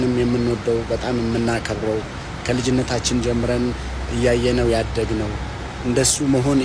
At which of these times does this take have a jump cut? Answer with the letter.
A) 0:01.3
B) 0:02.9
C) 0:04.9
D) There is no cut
D